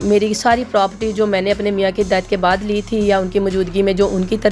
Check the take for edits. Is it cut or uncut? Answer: uncut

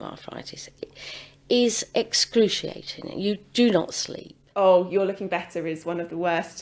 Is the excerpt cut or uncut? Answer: cut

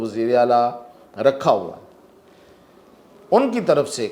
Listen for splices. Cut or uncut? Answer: uncut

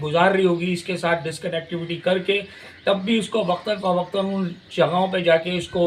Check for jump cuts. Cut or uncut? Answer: uncut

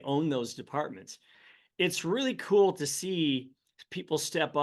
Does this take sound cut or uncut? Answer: cut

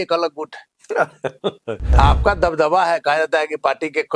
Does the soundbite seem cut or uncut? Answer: cut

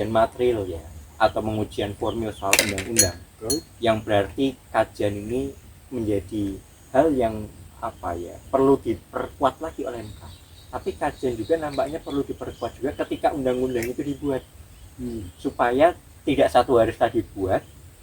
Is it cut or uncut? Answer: uncut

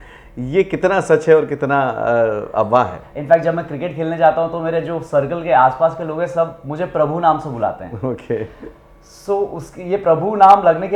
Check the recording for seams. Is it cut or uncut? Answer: cut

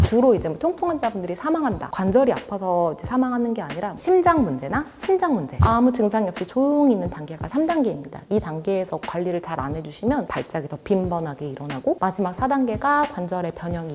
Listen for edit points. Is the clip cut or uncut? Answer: cut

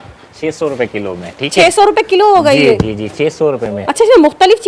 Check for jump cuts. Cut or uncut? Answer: uncut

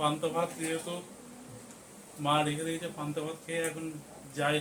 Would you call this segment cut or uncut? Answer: uncut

